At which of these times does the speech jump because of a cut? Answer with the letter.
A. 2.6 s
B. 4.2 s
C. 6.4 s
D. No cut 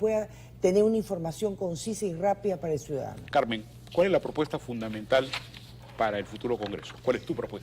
A